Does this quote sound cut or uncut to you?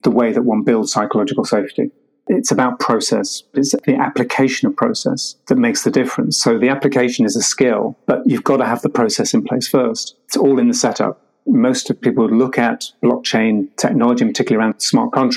cut